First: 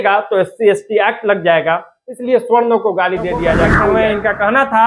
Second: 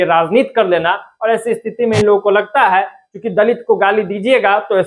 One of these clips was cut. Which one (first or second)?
first